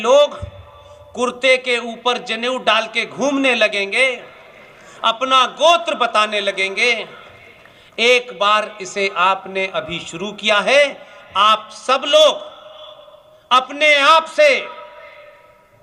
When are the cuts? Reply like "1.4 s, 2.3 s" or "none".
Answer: none